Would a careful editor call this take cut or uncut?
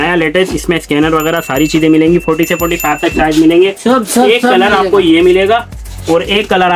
uncut